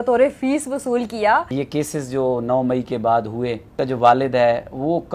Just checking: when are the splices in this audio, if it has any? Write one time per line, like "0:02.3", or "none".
0:01.5
0:03.6